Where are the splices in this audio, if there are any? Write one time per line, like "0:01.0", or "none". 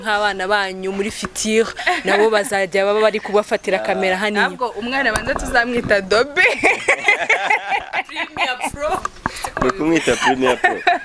none